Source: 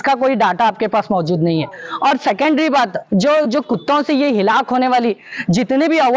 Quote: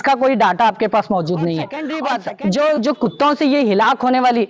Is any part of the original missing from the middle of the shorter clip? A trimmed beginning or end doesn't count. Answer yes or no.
yes